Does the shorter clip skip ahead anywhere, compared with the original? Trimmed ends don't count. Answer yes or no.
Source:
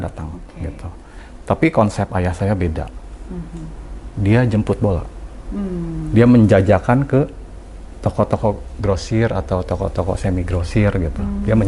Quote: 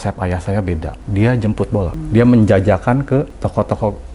yes